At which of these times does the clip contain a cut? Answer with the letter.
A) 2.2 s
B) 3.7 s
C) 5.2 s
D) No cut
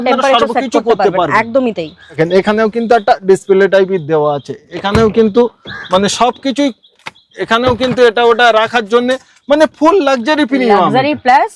A